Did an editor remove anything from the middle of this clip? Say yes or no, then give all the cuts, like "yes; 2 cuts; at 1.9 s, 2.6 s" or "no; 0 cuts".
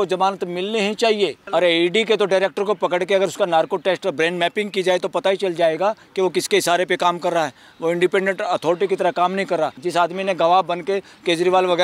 yes; 2 cuts; at 1.4 s, 9.8 s